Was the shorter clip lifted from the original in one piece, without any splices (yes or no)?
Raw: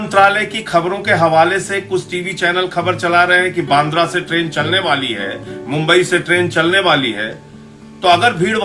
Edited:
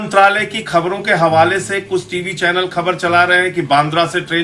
yes